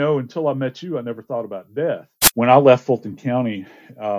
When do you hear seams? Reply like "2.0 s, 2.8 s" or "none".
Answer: 2.2 s